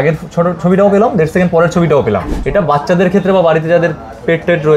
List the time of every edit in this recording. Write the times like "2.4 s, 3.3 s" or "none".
2.3 s